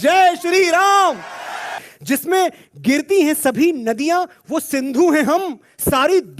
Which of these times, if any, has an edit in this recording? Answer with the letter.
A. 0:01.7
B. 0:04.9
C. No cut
A